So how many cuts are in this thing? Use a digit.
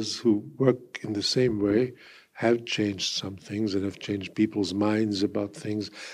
0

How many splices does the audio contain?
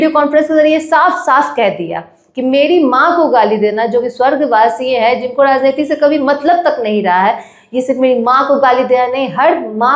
0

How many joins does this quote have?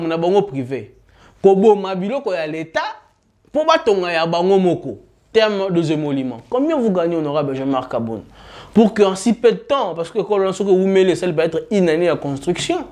1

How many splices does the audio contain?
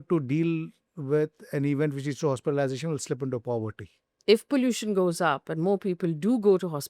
1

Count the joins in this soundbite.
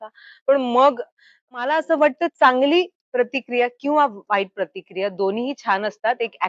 1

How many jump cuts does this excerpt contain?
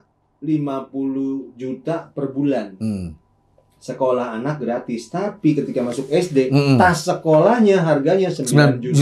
0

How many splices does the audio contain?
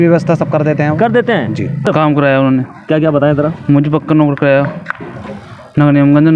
1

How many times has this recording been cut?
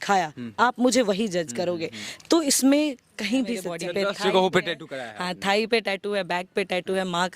1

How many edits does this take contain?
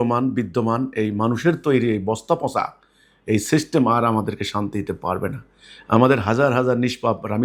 0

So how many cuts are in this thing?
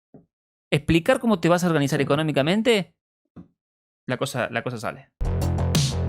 1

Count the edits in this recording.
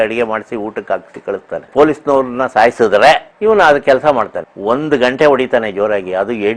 1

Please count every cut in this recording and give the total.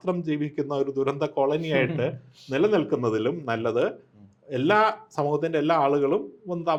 0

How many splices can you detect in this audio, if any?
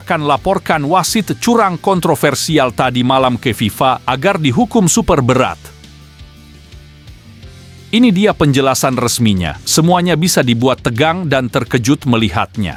0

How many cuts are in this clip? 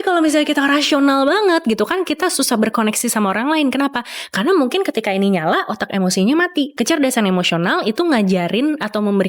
1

